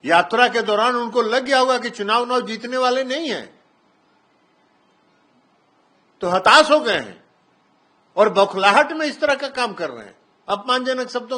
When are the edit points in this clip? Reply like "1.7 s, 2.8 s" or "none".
none